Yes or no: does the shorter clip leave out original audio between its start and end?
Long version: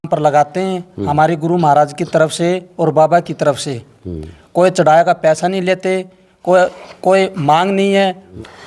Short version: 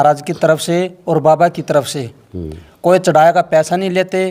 no